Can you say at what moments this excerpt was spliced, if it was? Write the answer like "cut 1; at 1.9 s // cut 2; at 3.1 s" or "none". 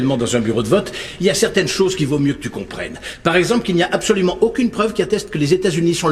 none